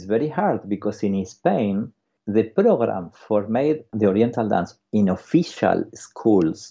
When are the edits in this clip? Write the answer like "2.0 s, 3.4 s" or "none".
2.1 s, 3.9 s